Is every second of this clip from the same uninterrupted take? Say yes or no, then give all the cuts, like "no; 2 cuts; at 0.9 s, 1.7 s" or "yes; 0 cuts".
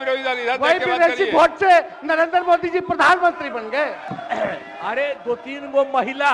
no; 1 cut; at 4.1 s